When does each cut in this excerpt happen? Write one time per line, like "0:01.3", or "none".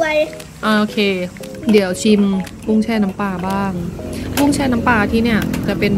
0:01.4